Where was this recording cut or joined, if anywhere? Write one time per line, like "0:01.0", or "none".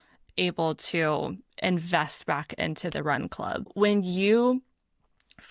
0:03.7